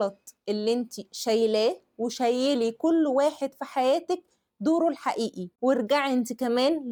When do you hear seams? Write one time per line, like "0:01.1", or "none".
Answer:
none